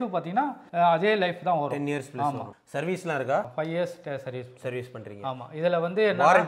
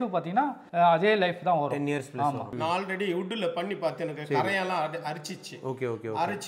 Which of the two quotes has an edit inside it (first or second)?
second